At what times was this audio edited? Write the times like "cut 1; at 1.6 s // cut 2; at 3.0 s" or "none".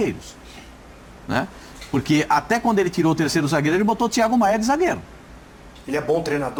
none

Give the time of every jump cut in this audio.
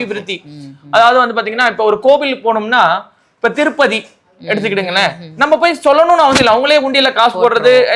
none

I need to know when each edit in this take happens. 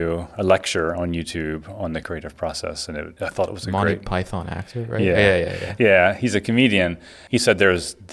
cut 1; at 2.0 s // cut 2; at 3.1 s

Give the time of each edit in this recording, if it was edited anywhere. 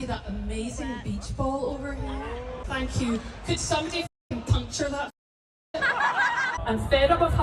cut 1; at 2.6 s // cut 2; at 6.5 s

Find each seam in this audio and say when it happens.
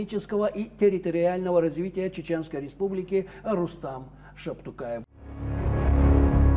cut 1; at 5.0 s

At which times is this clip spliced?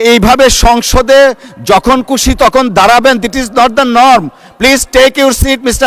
none

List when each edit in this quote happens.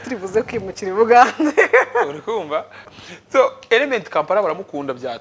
cut 1; at 2.9 s

